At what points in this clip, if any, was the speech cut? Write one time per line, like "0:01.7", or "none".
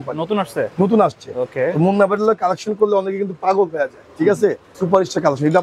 0:04.7